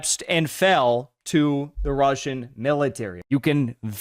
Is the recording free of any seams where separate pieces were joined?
no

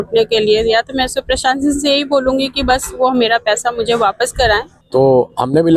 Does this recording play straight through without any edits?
no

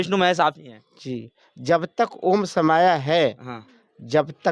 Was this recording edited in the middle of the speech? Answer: no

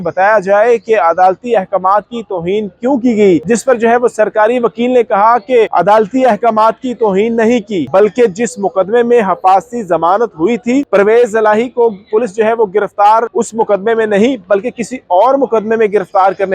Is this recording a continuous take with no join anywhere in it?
no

